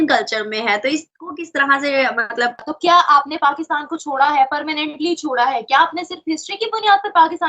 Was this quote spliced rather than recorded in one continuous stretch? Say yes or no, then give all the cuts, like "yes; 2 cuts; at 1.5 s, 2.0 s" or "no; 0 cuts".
yes; 1 cut; at 2.7 s